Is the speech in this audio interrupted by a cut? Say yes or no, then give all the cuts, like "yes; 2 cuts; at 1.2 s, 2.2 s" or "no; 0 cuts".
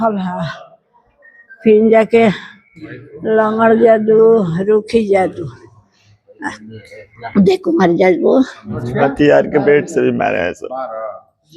yes; 1 cut; at 8.8 s